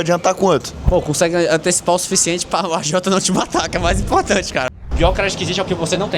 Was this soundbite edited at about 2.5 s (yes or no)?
no